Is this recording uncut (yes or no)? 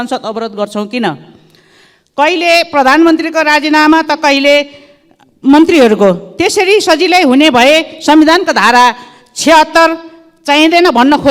yes